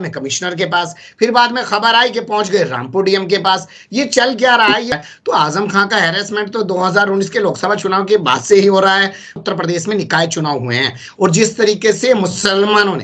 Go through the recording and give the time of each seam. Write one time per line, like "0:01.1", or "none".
0:04.9
0:09.3